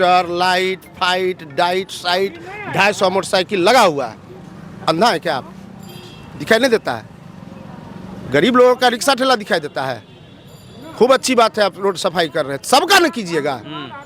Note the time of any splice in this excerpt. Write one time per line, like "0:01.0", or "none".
none